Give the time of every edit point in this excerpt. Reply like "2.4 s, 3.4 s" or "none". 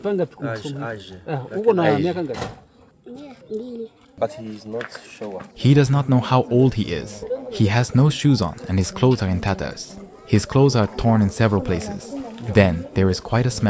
none